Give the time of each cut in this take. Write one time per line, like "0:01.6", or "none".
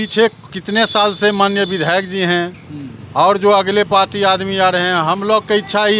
none